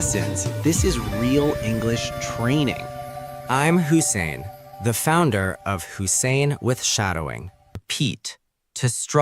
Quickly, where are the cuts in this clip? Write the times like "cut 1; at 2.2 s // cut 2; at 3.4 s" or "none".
cut 1; at 7.9 s